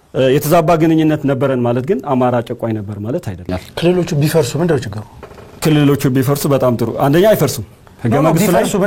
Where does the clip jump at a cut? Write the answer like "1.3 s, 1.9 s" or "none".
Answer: 3.6 s